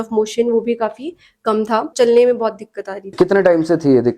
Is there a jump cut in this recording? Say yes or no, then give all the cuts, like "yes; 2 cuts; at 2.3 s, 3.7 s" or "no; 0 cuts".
yes; 2 cuts; at 1.9 s, 3.1 s